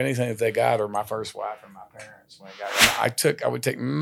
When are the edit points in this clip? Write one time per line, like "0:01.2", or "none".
0:02.8